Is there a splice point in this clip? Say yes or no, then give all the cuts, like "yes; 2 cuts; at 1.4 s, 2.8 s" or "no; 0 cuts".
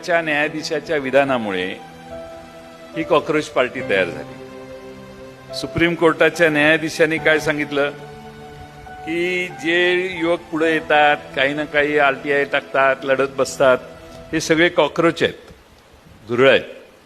no; 0 cuts